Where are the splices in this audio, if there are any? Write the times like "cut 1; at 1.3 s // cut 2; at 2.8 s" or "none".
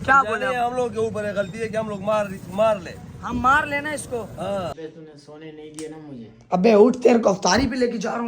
cut 1; at 4.7 s